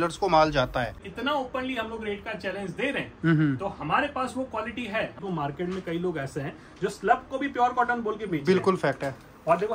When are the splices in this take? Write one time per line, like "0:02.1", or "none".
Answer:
0:00.9
0:05.2